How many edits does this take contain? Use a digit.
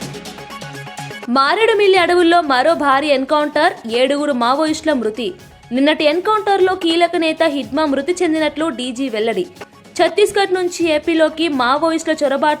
1